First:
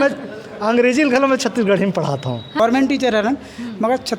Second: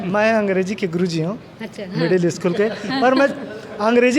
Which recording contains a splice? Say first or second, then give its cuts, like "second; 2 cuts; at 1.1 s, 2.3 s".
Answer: first; 1 cut; at 2.5 s